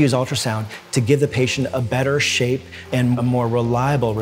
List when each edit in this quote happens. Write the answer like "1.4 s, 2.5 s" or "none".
3.0 s